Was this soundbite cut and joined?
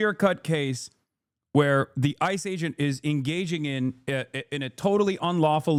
no; 0 cuts

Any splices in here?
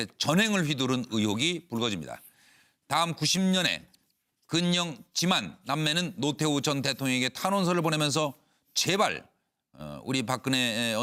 no; 0 cuts

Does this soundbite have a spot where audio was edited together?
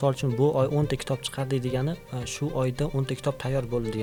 no; 0 cuts

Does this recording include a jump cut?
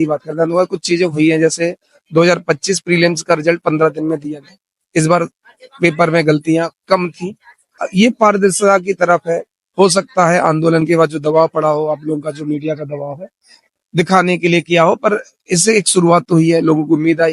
yes; 1 cut; at 7.8 s

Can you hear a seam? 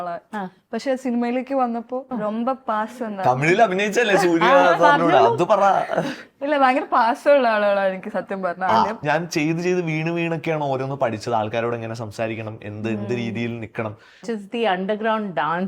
yes; 3 cuts; at 2.1 s, 9.0 s, 14.2 s

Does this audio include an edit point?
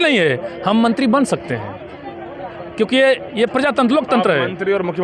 no; 0 cuts

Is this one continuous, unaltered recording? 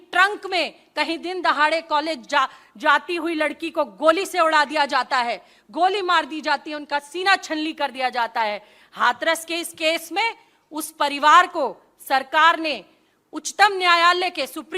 yes; 0 cuts

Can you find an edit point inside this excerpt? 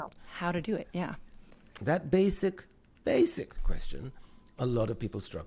no; 0 cuts

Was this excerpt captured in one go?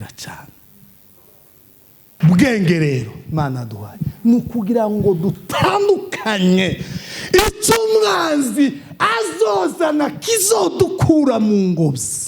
no; 1 cut; at 2.2 s

